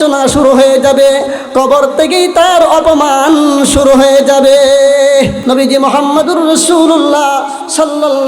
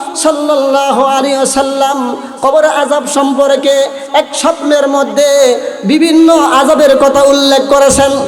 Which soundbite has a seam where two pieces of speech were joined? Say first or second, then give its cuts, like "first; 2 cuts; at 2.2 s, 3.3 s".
first; 1 cut; at 5.4 s